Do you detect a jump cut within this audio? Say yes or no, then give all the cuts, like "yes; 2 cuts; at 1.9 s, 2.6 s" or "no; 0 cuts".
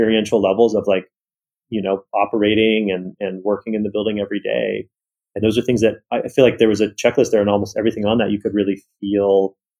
no; 0 cuts